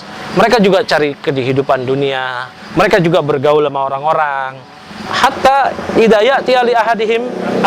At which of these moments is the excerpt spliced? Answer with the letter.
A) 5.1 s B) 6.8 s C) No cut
A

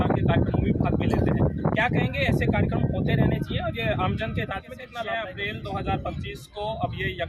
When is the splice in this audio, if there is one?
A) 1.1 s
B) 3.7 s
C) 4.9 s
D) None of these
C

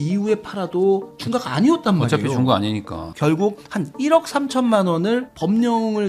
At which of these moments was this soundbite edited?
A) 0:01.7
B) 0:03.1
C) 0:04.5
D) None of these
B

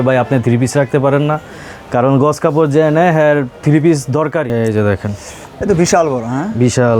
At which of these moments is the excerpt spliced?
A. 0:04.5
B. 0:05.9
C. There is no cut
A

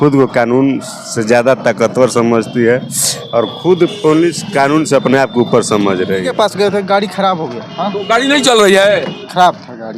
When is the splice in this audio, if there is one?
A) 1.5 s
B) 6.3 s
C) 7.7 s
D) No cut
B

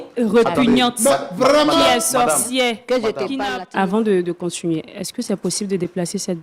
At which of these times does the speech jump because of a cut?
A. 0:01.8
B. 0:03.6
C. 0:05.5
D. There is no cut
B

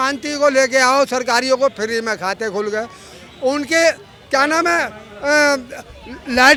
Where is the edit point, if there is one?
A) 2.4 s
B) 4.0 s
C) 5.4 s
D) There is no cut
D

